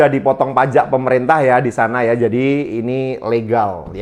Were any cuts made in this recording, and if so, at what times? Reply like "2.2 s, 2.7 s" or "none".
none